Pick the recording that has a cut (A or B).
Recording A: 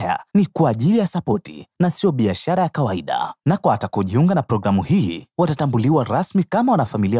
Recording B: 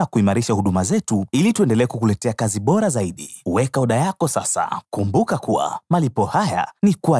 B